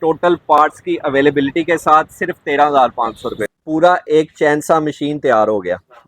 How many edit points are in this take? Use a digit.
1